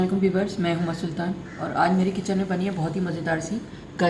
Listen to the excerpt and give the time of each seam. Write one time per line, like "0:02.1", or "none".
none